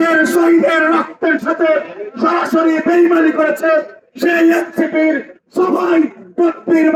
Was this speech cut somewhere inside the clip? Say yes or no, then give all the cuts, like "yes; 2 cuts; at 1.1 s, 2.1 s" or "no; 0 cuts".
no; 0 cuts